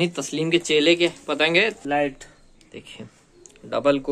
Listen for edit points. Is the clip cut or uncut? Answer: cut